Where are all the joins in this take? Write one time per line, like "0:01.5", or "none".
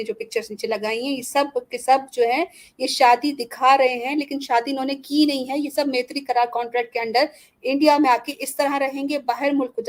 none